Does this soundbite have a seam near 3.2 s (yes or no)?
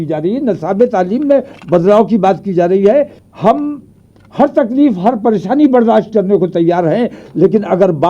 yes